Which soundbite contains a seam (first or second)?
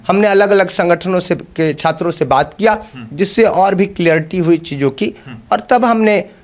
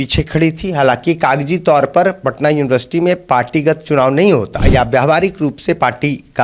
second